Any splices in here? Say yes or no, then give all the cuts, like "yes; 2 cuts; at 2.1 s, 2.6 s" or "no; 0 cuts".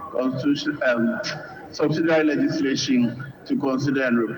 no; 0 cuts